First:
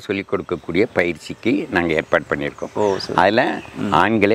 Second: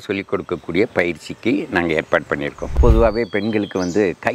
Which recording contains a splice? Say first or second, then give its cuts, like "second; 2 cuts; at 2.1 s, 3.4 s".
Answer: second; 1 cut; at 2.8 s